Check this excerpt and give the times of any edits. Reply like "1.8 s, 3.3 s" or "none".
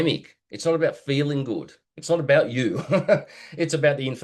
none